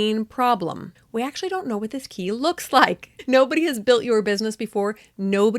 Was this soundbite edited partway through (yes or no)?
yes